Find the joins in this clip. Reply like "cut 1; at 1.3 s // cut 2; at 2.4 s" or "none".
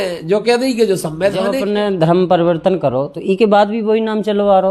cut 1; at 1.6 s

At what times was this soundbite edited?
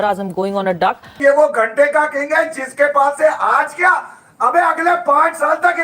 cut 1; at 1.1 s

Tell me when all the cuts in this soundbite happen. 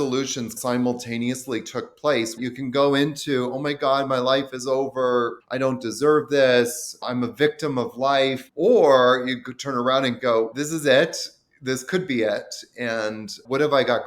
cut 1; at 2.4 s // cut 2; at 8.4 s

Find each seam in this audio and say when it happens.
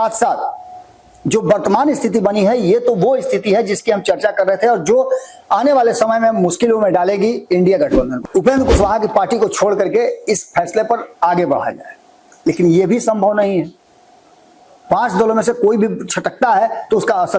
cut 1; at 8.1 s

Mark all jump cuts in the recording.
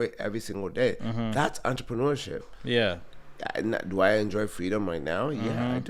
none

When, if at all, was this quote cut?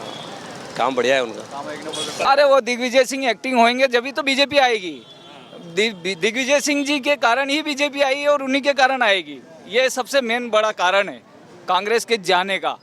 cut 1; at 2.1 s

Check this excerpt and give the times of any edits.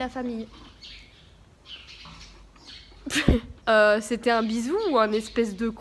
cut 1; at 3.5 s

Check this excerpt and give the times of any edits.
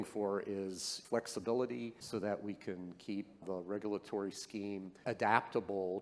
cut 1; at 0.9 s // cut 2; at 2.0 s // cut 3; at 3.4 s // cut 4; at 5.0 s

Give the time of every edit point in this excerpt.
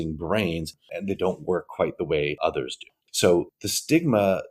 cut 1; at 0.9 s // cut 2; at 2.4 s

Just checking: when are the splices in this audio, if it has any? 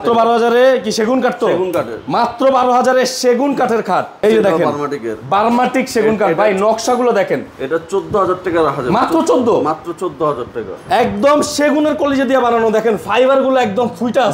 cut 1; at 4.2 s

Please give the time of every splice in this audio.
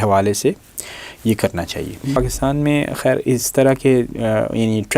cut 1; at 2.2 s

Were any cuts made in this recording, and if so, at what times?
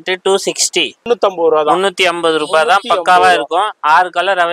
cut 1; at 1.0 s

